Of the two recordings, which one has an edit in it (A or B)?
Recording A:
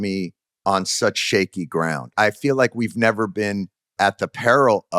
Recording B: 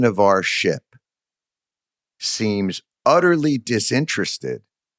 A